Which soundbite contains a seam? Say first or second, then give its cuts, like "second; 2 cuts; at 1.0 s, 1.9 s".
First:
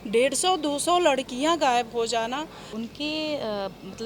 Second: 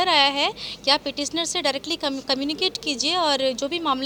first; 1 cut; at 2.7 s